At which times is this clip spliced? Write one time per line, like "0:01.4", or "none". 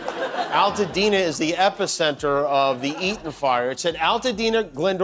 none